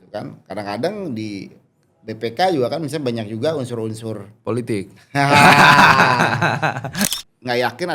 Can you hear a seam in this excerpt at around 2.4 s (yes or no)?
no